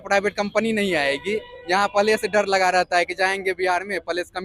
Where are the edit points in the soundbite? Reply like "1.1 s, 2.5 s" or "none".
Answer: none